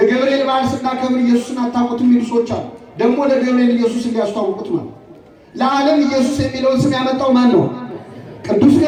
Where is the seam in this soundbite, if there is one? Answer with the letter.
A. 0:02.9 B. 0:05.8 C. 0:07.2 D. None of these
D